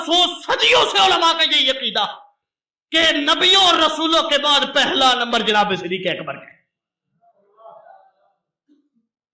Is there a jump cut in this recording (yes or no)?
no